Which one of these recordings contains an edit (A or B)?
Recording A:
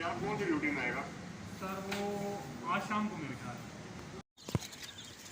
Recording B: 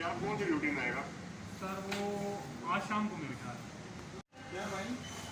A